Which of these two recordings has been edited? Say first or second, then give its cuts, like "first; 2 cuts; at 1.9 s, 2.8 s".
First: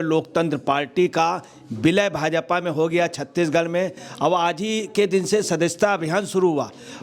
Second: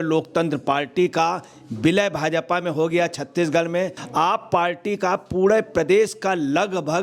second; 1 cut; at 4.0 s